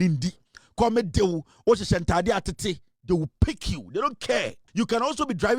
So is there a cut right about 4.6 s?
yes; 1 cut; at 4.6 s

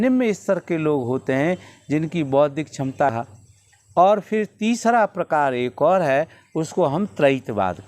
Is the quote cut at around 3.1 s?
yes; 1 cut; at 3.1 s

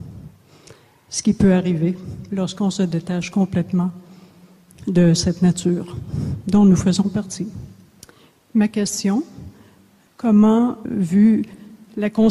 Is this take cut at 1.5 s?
yes; 1 cut; at 1.5 s

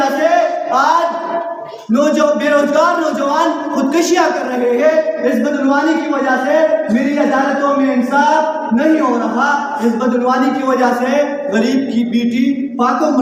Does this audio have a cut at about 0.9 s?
no; 0 cuts

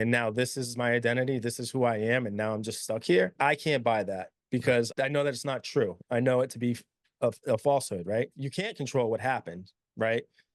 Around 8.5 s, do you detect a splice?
yes; 3 cuts; at 3.3 s, 4.9 s, 8.5 s

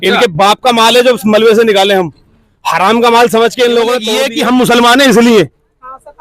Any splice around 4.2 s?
yes; 1 cut; at 4.2 s

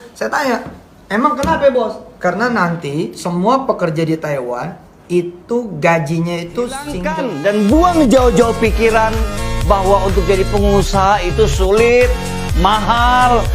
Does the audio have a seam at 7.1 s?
yes; 1 cut; at 7.1 s

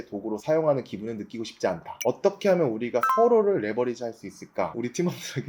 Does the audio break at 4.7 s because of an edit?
yes; 2 cuts; at 2.0 s, 4.7 s

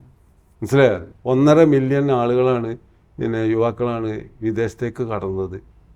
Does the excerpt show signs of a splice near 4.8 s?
no; 1 cut; at 1.1 s

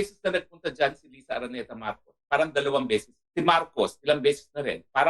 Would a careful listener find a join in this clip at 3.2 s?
yes; 1 cut; at 3.2 s

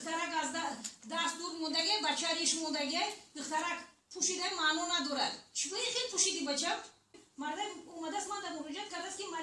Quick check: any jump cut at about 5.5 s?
no; 1 cut; at 7.2 s

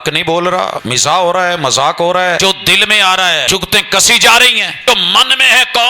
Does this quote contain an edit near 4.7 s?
yes; 4 cuts; at 0.9 s, 2.4 s, 3.4 s, 4.7 s

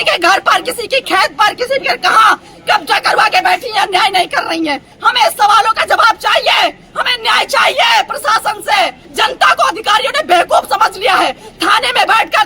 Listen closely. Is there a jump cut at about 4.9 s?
yes; 2 cuts; at 4.9 s, 9.0 s

